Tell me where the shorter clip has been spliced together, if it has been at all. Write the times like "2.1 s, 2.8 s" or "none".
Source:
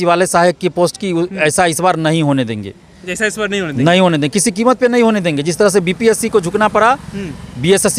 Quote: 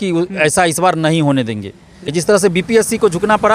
2.1 s